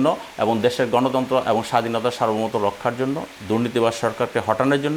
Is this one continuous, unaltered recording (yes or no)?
yes